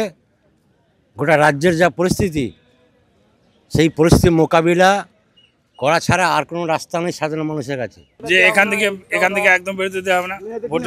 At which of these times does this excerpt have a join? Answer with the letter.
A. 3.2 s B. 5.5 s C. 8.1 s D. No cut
C